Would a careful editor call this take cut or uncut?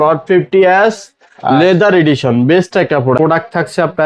cut